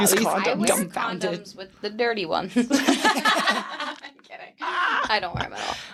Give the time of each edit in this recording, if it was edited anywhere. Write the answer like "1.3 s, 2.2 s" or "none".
none